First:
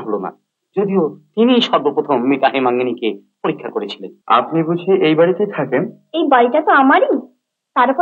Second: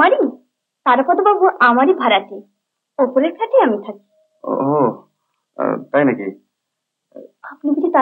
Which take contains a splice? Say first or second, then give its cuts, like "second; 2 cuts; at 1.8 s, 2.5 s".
first; 1 cut; at 4.1 s